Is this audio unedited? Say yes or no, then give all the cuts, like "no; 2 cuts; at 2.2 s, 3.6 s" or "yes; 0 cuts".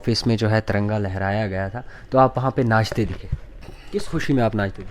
no; 1 cut; at 3.7 s